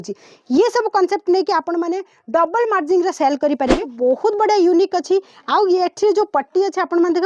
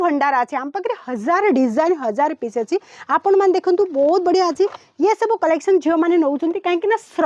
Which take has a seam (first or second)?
first